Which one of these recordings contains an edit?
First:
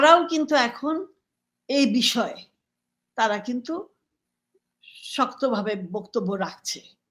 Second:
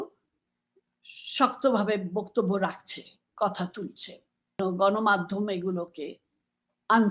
second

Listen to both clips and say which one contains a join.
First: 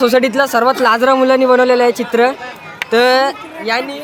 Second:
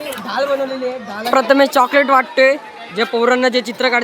second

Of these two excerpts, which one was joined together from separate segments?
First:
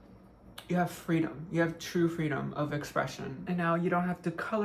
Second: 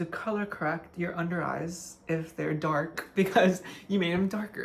first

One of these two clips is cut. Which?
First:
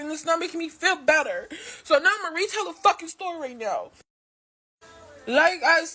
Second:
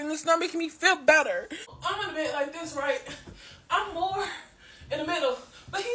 second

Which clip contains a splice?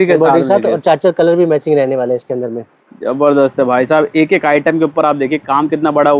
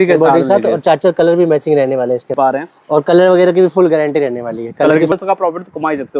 second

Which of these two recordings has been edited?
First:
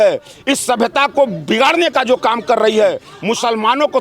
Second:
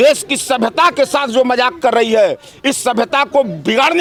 first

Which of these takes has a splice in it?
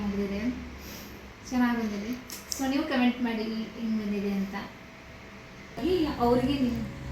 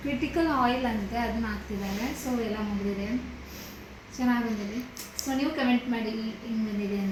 first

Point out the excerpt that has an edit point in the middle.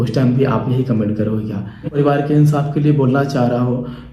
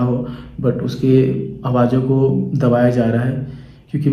first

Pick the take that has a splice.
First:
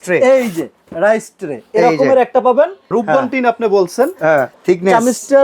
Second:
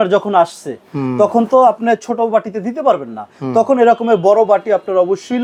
first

